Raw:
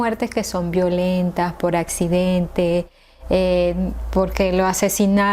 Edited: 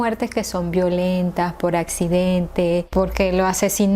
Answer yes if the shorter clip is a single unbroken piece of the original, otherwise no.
no